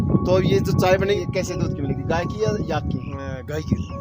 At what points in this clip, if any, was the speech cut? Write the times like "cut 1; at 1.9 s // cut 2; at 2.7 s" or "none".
cut 1; at 1.2 s